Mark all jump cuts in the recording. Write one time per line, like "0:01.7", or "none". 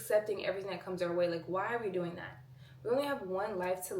none